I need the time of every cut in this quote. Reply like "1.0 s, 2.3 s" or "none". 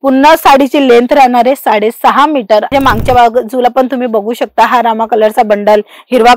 2.7 s

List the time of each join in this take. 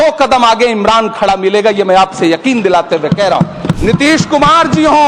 3.8 s

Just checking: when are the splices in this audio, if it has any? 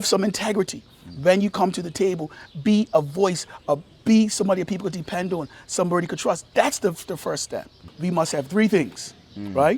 7.8 s

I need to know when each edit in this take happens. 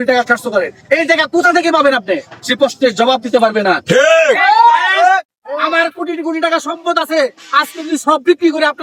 none

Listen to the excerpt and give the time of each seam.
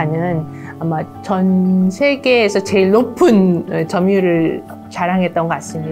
none

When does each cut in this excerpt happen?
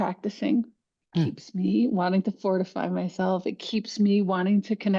none

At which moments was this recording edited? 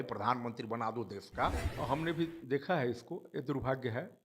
1.6 s

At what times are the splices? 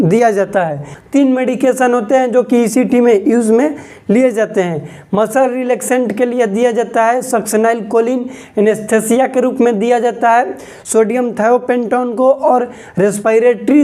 0.9 s

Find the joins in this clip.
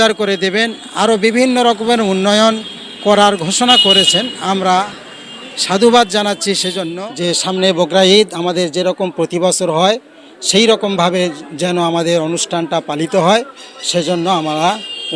7.6 s

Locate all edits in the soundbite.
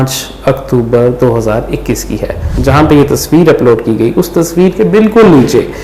2.5 s

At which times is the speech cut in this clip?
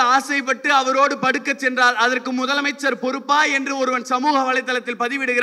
none

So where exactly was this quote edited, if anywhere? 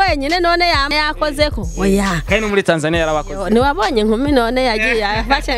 0.9 s

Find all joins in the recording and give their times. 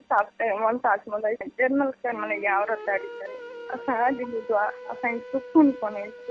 1.5 s

